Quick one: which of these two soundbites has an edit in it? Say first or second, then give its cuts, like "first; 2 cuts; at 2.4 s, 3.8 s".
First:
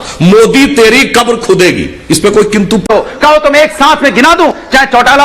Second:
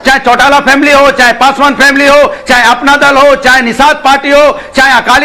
first; 1 cut; at 2.9 s